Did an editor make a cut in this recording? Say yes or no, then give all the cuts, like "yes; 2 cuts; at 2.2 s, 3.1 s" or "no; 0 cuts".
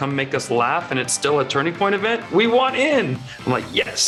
no; 0 cuts